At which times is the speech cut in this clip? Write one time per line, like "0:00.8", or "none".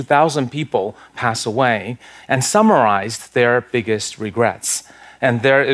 none